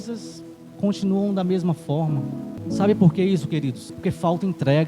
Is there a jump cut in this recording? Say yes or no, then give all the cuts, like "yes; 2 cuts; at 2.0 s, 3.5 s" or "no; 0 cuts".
yes; 2 cuts; at 2.5 s, 3.9 s